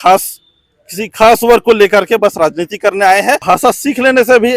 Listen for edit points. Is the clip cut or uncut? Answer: cut